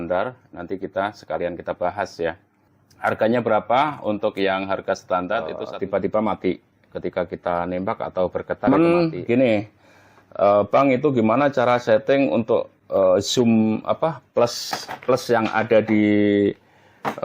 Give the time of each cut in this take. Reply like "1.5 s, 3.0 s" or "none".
5.6 s, 8.7 s